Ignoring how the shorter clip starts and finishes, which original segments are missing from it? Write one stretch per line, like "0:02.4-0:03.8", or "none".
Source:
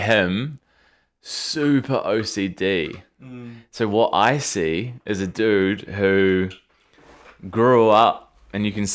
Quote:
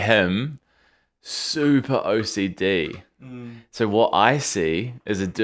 none